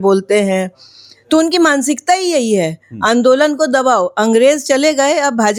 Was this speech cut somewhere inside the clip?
no; 0 cuts

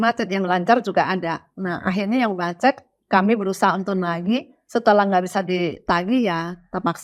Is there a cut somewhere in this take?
no; 0 cuts

